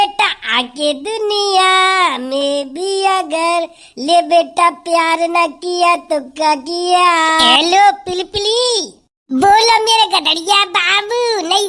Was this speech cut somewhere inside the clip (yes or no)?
yes